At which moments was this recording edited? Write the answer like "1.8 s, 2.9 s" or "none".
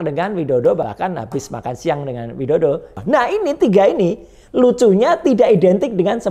0.8 s, 2.9 s